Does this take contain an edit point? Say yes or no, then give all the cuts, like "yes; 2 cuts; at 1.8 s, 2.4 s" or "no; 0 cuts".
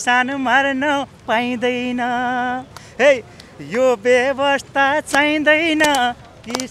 no; 0 cuts